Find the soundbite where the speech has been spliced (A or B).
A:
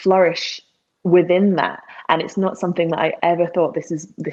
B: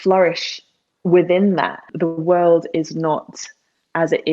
B